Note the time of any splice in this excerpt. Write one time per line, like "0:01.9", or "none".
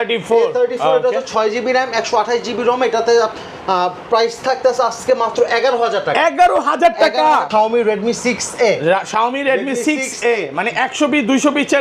0:07.5